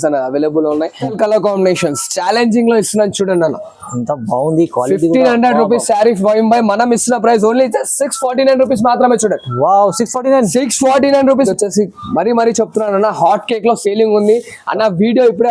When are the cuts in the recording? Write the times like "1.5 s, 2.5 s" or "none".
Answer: 1.0 s, 11.5 s